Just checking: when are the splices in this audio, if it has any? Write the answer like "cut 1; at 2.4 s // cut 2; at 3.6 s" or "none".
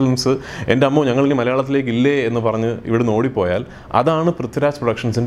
none